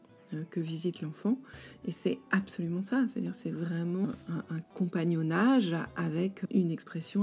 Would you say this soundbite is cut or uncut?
cut